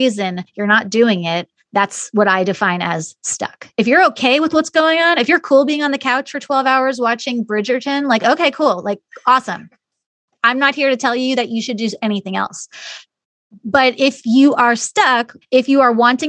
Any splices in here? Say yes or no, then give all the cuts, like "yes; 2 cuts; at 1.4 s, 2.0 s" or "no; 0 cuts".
yes; 1 cut; at 15.3 s